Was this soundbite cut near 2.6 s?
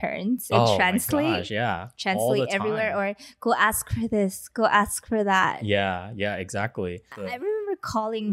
no; 1 cut; at 7.2 s

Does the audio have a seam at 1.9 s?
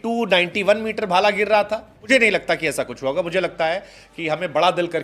yes; 1 cut; at 1.9 s

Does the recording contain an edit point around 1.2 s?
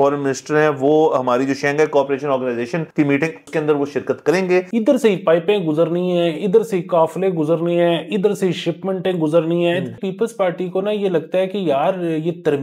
no; 3 cuts; at 3.2 s, 4.7 s, 10.0 s

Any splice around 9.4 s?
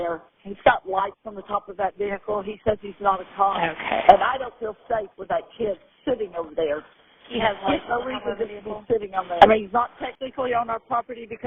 yes; 2 cuts; at 3.6 s, 9.4 s

